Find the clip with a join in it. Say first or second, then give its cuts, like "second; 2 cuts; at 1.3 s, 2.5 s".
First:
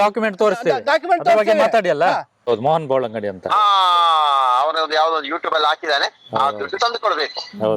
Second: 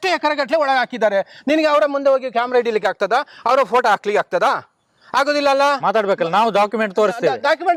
first; 1 cut; at 2.5 s